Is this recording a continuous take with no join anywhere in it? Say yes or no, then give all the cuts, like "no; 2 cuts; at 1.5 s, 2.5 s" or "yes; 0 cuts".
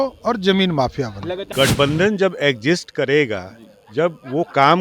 no; 1 cut; at 1.4 s